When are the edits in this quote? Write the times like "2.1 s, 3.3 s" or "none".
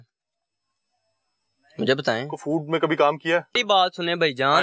3.6 s